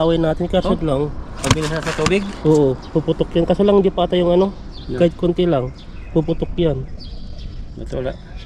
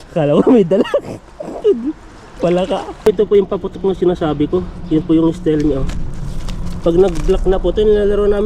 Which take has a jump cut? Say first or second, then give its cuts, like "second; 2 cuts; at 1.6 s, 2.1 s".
second; 1 cut; at 2.9 s